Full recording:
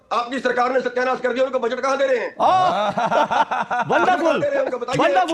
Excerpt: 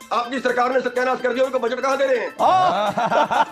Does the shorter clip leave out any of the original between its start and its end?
no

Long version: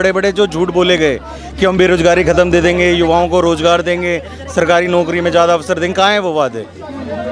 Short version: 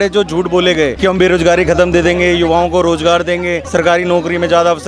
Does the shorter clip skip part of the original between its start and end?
yes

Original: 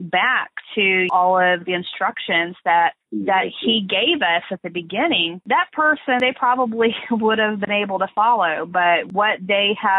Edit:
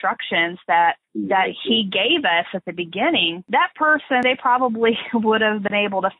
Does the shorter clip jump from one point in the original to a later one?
no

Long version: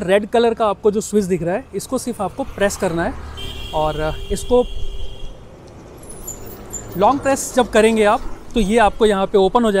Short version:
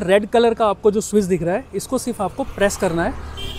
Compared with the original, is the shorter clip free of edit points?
yes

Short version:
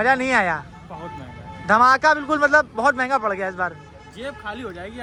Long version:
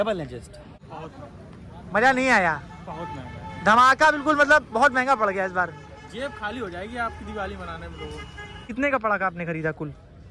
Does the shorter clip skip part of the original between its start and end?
no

